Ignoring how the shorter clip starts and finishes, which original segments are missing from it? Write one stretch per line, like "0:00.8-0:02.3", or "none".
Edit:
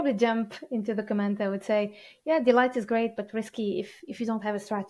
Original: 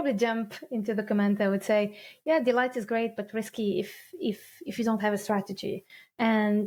0:04.0-0:04.6